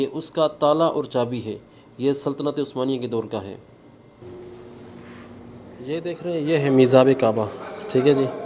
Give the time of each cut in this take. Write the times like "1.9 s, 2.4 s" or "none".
none